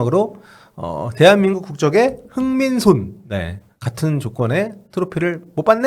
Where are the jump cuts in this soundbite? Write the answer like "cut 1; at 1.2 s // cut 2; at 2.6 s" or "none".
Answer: none